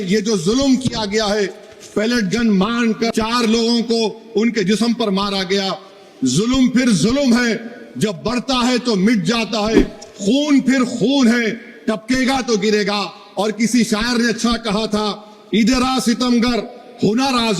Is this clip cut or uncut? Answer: cut